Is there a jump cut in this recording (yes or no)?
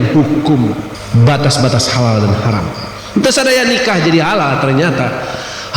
yes